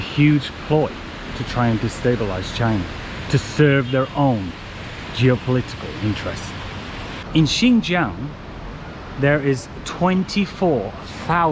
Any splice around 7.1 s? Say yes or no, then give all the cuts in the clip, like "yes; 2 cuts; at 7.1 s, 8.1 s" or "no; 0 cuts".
yes; 1 cut; at 7.1 s